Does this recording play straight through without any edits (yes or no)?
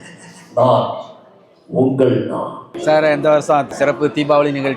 no